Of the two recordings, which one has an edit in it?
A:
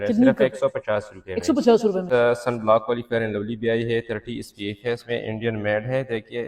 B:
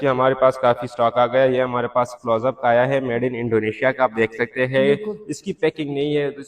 A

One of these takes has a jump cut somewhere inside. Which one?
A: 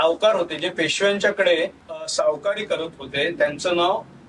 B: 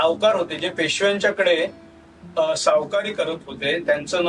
A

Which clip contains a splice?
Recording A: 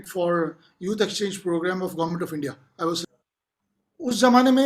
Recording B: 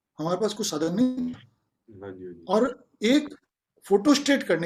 A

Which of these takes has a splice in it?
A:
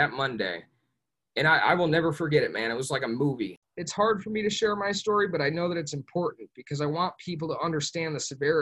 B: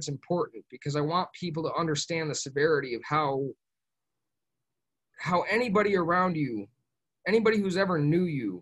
A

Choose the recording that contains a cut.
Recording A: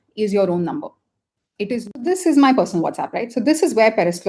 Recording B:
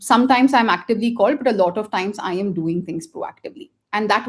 A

